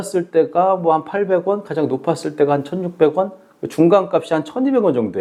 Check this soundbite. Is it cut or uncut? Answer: uncut